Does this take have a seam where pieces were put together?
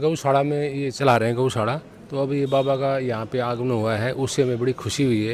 no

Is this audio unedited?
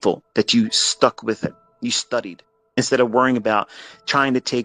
no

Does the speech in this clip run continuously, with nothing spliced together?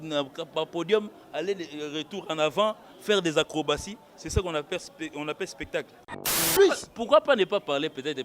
no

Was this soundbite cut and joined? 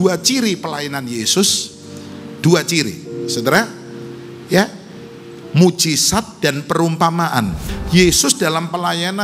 yes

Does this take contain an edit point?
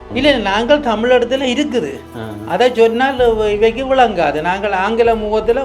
no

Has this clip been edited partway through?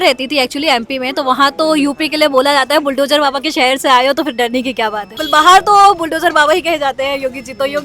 yes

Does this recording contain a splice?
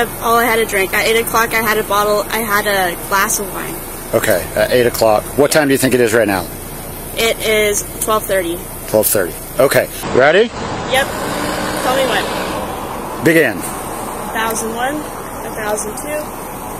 yes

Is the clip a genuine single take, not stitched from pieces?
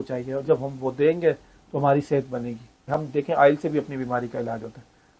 no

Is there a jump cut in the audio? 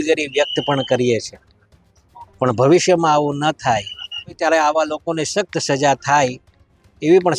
yes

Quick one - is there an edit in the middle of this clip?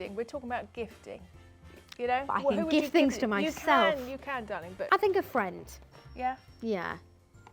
yes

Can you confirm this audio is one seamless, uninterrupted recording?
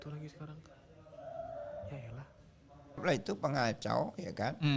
no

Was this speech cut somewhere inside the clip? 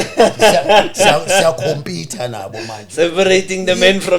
no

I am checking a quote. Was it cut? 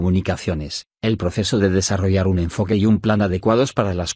yes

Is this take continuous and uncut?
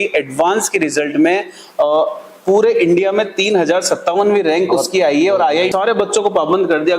no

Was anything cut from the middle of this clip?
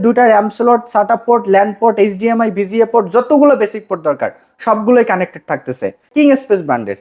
yes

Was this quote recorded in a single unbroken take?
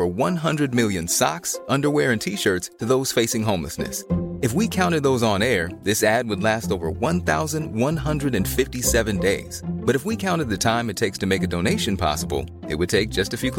yes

